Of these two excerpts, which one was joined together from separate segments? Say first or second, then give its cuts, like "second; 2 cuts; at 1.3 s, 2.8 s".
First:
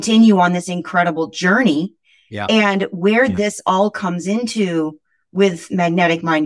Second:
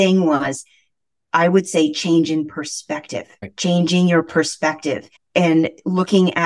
second; 2 cuts; at 3.4 s, 5.1 s